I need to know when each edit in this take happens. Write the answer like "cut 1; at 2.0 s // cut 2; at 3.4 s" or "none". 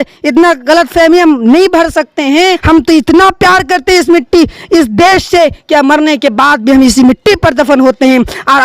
cut 1; at 2.6 s